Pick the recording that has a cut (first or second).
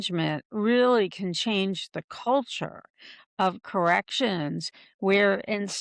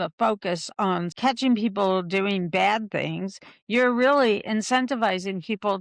second